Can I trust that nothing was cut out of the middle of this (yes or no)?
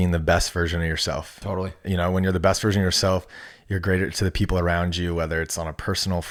yes